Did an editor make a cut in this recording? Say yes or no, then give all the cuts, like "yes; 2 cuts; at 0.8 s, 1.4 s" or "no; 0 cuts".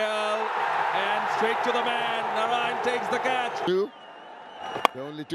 yes; 1 cut; at 3.6 s